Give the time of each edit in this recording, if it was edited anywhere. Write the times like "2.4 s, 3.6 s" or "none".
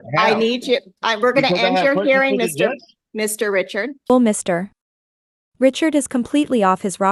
none